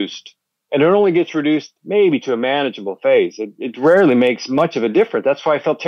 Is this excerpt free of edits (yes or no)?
yes